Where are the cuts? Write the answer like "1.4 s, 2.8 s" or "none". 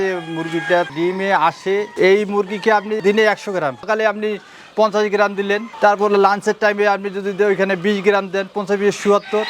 0.9 s, 3.9 s